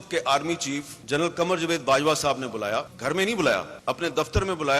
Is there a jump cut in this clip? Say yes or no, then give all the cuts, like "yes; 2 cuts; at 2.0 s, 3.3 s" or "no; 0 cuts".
yes; 3 cuts; at 0.9 s, 2.9 s, 3.7 s